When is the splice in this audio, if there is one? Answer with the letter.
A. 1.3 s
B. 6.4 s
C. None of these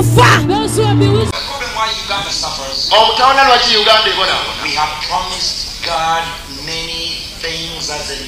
A